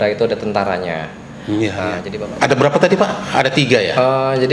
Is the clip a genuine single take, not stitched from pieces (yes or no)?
no